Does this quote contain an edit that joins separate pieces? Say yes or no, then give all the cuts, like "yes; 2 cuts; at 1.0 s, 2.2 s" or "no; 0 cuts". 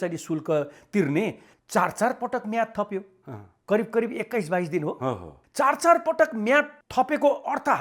yes; 1 cut; at 1.4 s